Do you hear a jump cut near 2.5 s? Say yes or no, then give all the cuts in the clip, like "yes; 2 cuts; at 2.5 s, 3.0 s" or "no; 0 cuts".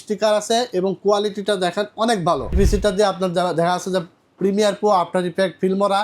yes; 1 cut; at 2.5 s